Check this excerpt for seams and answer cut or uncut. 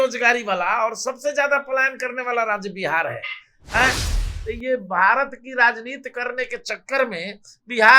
cut